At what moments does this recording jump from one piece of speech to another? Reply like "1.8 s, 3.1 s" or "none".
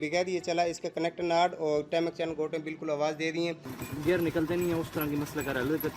3.8 s